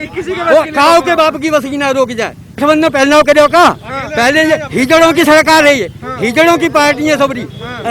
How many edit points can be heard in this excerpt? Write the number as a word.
one